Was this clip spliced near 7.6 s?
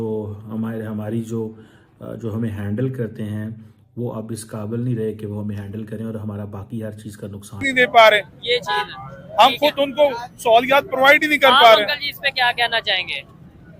yes; 1 cut; at 7.6 s

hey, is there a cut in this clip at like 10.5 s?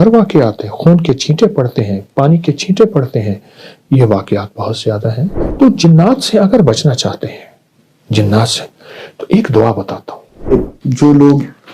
yes; 2 cuts; at 5.4 s, 10.5 s

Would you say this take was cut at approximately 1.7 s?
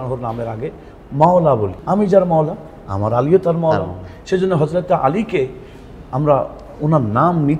yes; 1 cut; at 1.7 s

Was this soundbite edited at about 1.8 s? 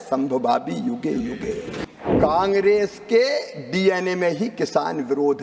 yes; 1 cut; at 1.8 s

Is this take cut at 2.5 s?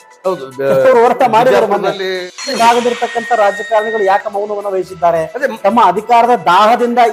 yes; 1 cut; at 2.5 s

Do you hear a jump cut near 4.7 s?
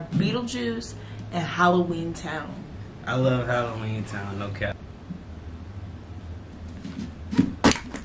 yes; 1 cut; at 4.7 s

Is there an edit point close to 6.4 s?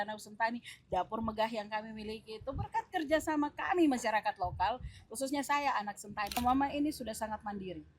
yes; 1 cut; at 6.4 s

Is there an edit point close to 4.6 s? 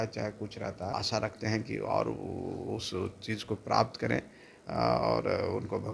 no; 1 cut; at 0.9 s

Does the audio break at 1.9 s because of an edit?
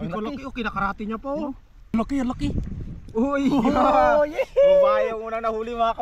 yes; 1 cut; at 1.9 s

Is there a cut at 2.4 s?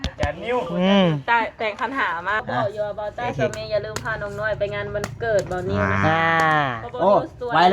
yes; 1 cut; at 2.4 s

